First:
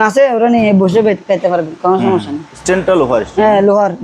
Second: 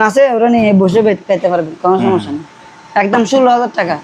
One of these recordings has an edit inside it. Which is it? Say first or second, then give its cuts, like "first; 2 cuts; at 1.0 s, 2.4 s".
first; 1 cut; at 2.6 s